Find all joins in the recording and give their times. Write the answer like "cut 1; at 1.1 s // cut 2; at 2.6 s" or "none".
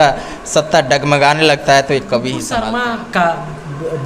cut 1; at 2.4 s